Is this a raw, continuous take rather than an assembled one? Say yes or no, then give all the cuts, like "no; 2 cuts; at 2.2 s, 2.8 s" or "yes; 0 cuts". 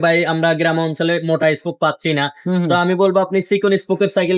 yes; 0 cuts